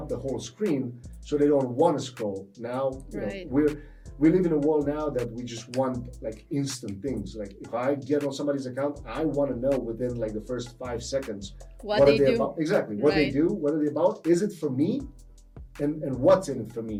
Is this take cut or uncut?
uncut